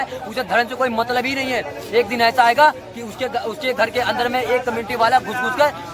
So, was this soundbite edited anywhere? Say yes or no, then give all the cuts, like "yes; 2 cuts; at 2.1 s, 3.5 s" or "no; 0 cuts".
no; 0 cuts